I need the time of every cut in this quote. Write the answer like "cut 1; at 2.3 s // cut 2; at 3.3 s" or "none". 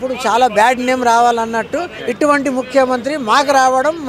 cut 1; at 2.0 s